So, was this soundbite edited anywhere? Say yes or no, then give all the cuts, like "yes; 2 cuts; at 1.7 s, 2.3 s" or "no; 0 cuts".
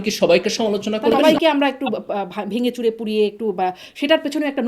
yes; 1 cut; at 1.2 s